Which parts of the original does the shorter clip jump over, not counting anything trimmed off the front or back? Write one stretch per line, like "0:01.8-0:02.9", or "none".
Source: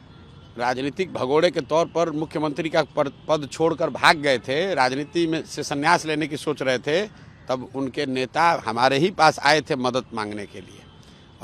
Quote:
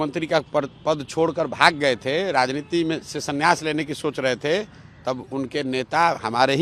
none

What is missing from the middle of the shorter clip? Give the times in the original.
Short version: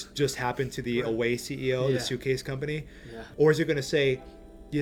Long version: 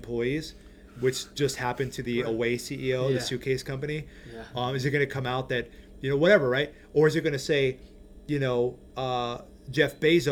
0:04.4-0:06.8

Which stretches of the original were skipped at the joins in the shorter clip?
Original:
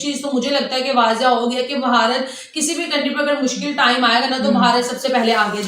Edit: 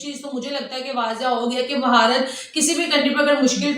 none

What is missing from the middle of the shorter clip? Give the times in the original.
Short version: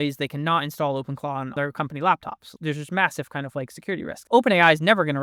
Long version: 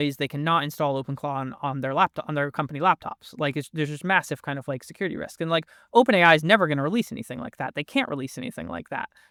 0:01.5-0:02.3
0:03.3-0:03.6
0:05.3-0:05.8

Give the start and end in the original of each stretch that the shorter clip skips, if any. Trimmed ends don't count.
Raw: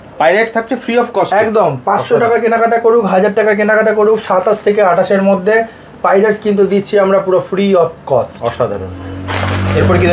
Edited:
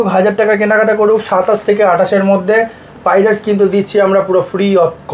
none

